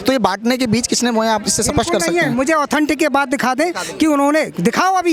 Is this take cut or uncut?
uncut